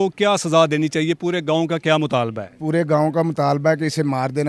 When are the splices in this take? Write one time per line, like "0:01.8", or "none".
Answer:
none